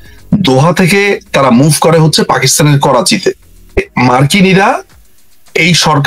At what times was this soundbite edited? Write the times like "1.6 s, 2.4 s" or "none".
3.9 s